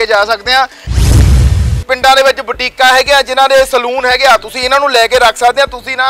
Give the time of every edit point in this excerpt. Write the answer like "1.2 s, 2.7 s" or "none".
1.3 s